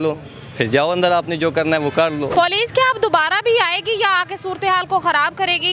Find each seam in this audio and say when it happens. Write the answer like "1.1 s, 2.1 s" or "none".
2.3 s